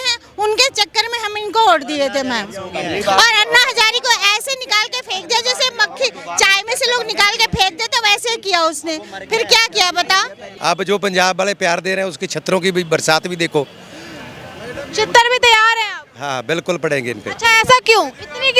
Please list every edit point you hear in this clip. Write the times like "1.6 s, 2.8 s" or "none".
10.4 s